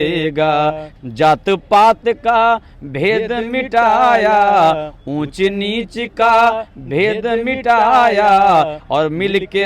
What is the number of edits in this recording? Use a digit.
1